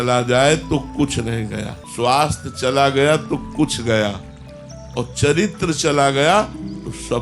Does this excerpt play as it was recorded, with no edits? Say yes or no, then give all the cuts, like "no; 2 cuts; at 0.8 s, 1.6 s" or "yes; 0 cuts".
no; 1 cut; at 1.8 s